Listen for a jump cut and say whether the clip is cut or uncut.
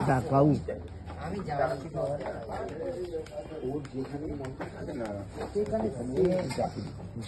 uncut